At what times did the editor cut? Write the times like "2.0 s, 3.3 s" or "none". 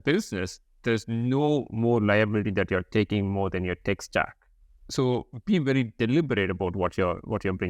4.8 s